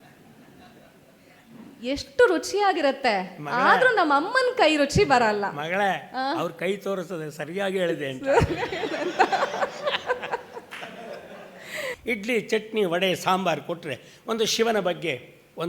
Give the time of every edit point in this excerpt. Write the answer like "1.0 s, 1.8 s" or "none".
11.8 s